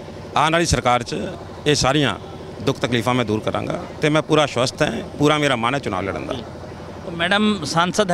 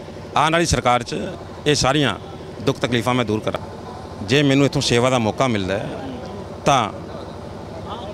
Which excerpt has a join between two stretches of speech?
second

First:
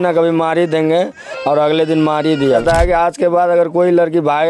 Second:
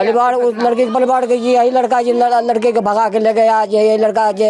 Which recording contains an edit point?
first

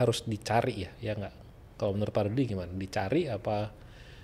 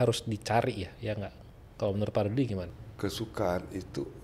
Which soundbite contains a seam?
second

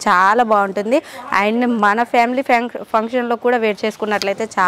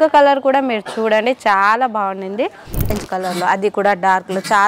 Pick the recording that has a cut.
second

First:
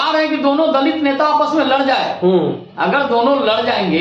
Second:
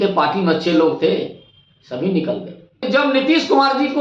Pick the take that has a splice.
second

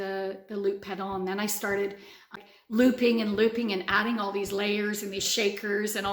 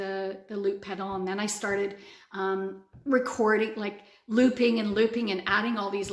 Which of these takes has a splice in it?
first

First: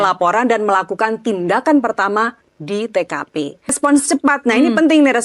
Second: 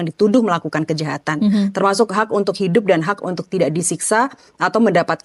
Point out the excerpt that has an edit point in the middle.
first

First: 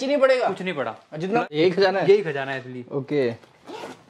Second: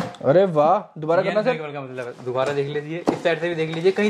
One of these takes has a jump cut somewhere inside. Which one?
first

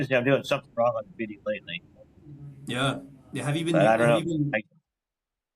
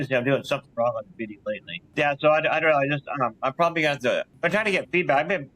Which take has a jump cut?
second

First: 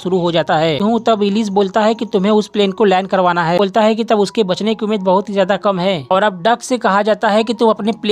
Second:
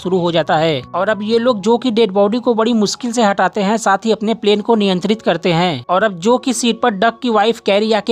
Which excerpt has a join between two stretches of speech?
first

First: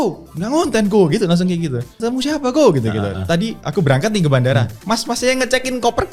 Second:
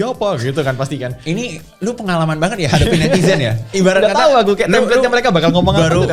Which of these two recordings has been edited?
first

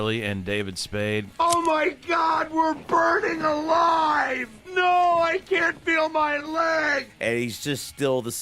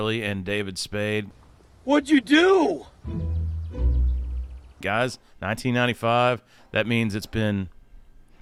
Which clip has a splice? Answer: first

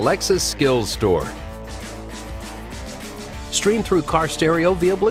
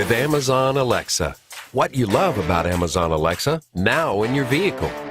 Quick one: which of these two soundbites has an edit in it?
second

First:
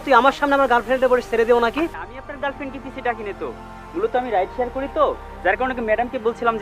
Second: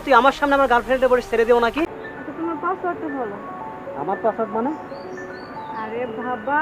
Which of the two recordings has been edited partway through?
second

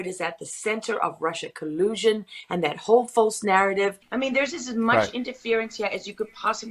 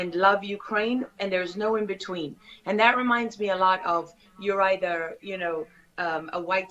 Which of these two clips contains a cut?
first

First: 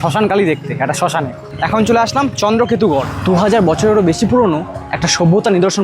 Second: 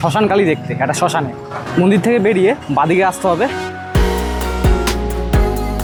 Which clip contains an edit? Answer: first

